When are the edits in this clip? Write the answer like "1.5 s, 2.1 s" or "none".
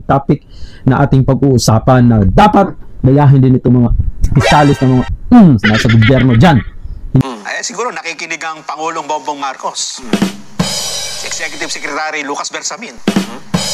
7.2 s